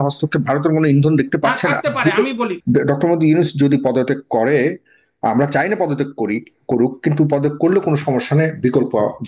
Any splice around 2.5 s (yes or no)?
yes